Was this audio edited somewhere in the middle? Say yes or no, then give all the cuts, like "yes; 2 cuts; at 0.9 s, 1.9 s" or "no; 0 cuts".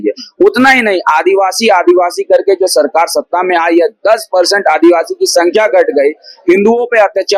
no; 0 cuts